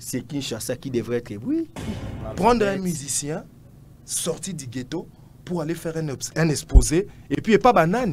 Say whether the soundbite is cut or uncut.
cut